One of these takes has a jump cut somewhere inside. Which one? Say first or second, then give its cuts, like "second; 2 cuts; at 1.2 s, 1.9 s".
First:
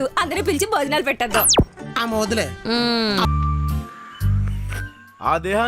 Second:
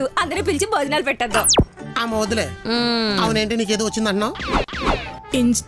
first; 1 cut; at 3.2 s